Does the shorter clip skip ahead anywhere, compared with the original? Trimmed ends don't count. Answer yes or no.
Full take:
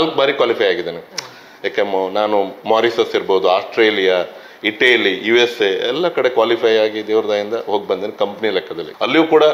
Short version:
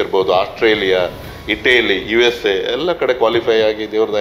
no